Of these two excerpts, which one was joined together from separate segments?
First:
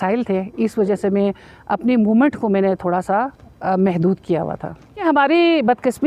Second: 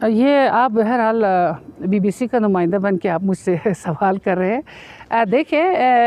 first; 1 cut; at 5.0 s

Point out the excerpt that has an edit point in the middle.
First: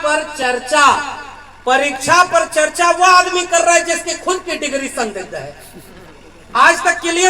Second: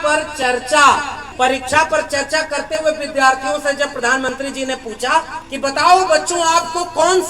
second; 2 cuts; at 1.2 s, 5.4 s

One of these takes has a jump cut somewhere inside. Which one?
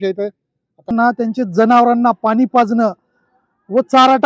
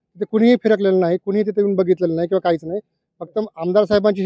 first; 1 cut; at 0.9 s

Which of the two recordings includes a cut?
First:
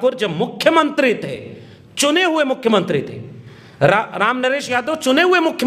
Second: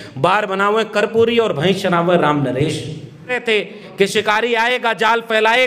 second; 1 cut; at 3.4 s

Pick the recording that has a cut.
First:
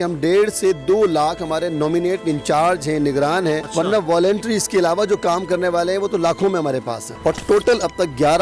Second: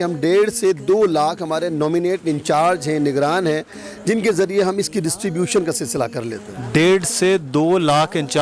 first; 2 cuts; at 3.7 s, 7.0 s

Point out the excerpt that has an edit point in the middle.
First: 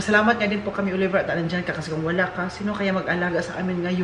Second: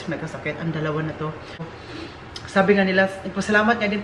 second; 1 cut; at 1.8 s

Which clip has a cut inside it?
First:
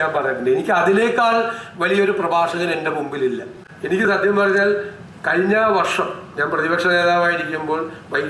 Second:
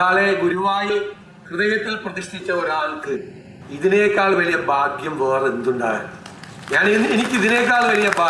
first; 1 cut; at 3.7 s

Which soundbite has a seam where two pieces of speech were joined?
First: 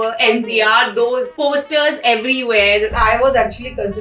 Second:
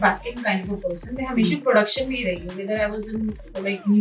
first; 2 cuts; at 1.3 s, 2.9 s

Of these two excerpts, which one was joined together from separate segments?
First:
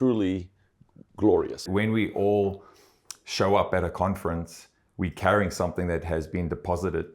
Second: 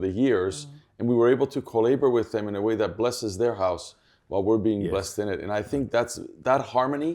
first; 1 cut; at 1.7 s

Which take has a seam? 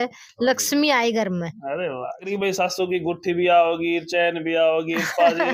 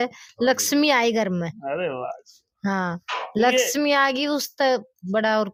first; 1 cut; at 2.2 s

